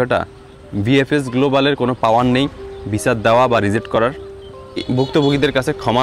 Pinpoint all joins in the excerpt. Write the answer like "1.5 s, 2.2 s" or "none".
4.8 s